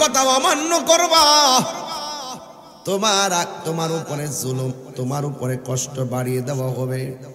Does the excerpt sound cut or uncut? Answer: uncut